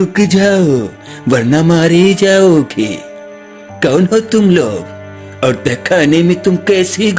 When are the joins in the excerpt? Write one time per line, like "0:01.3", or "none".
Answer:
none